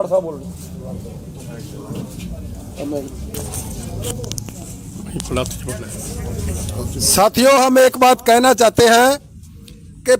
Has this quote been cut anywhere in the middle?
no; 0 cuts

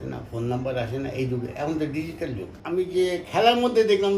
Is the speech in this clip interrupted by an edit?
yes; 1 cut; at 2.5 s

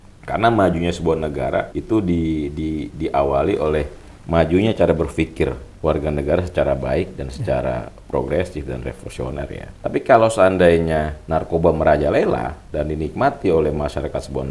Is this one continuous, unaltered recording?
no; 4 cuts; at 1.7 s, 5.7 s, 9.7 s, 11.2 s

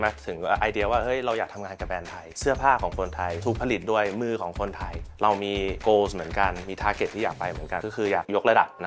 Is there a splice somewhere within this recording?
no; 0 cuts

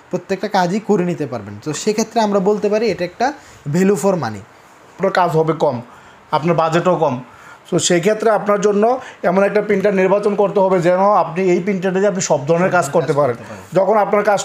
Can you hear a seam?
yes; 1 cut; at 5.0 s

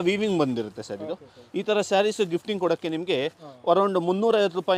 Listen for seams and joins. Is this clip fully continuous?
yes; 0 cuts

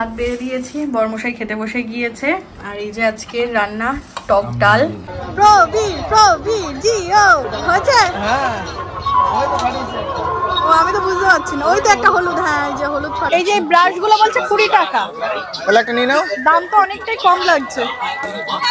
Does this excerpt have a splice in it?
yes; 3 cuts; at 5.2 s, 7.5 s, 13.3 s

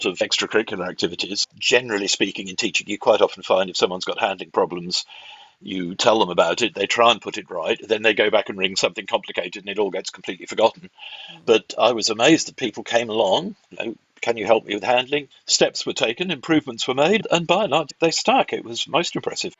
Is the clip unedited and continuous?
no; 3 cuts; at 1.3 s, 15.3 s, 17.9 s

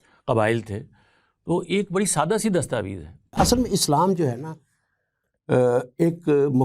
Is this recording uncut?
no; 1 cut; at 3.3 s

